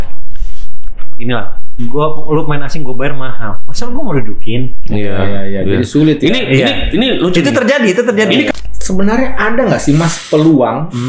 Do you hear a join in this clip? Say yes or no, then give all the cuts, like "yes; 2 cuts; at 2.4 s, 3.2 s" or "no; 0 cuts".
yes; 1 cut; at 8.5 s